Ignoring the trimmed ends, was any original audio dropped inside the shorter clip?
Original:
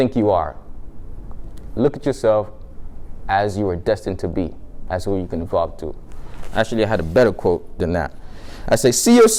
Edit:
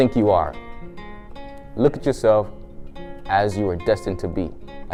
no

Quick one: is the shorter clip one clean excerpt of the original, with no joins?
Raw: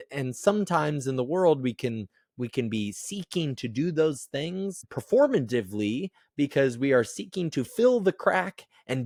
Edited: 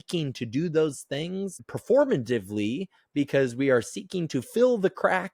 yes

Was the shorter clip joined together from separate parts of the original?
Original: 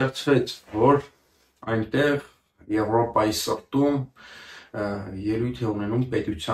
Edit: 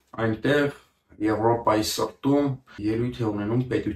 yes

